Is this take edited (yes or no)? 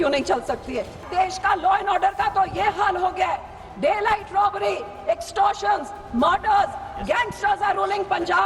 yes